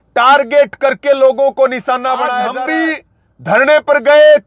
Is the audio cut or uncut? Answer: cut